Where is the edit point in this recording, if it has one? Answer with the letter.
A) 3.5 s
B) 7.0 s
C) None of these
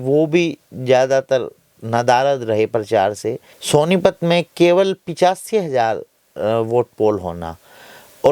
A